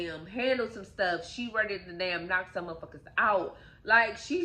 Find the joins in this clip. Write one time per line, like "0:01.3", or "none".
none